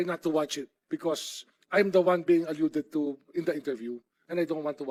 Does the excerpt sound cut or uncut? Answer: uncut